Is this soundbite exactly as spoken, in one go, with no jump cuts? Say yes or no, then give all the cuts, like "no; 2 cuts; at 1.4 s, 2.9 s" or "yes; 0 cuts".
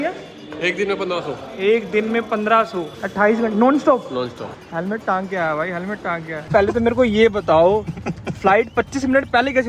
no; 3 cuts; at 3.0 s, 4.5 s, 6.4 s